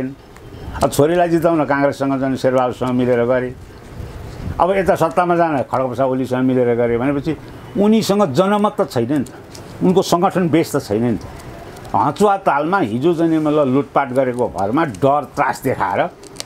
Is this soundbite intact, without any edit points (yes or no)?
yes